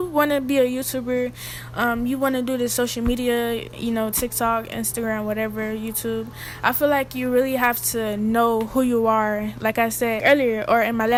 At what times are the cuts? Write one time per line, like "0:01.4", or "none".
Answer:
none